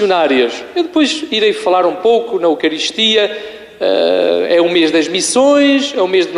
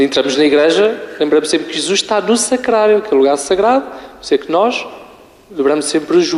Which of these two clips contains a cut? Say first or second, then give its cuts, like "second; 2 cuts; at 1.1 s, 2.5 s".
first; 1 cut; at 1.6 s